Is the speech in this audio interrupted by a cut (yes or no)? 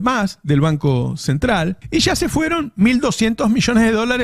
yes